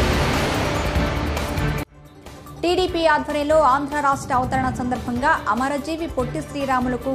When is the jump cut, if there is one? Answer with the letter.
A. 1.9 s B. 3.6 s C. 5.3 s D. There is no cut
A